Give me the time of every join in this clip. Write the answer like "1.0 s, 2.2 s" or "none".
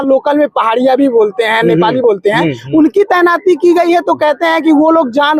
none

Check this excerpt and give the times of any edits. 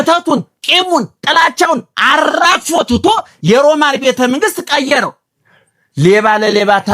5.3 s

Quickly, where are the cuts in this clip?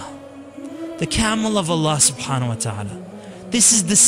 none

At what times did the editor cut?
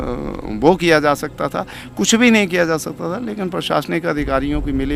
none

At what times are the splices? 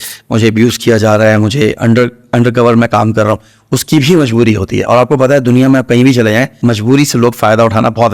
6.6 s

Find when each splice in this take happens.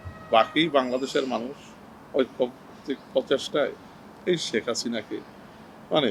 none

